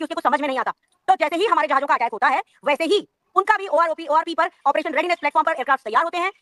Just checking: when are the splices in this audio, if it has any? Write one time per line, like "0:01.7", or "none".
none